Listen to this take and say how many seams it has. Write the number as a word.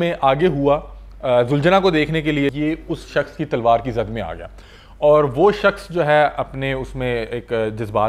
one